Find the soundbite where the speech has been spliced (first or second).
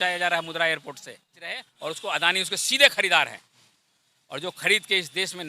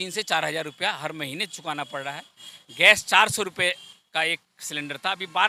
first